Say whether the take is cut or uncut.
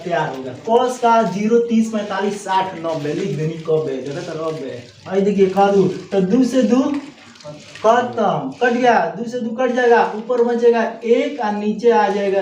cut